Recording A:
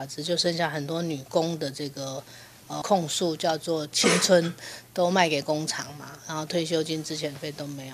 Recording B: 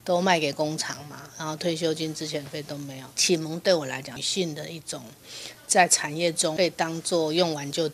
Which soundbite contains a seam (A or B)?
B